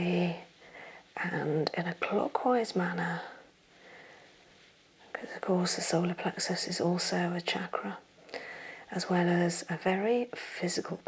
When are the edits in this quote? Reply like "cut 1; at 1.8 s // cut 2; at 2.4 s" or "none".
none